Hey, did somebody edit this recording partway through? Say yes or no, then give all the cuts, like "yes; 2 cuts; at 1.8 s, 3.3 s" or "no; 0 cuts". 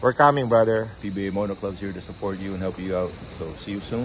yes; 1 cut; at 1.0 s